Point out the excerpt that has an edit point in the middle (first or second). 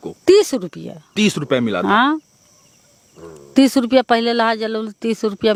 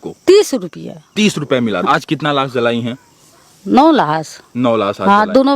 second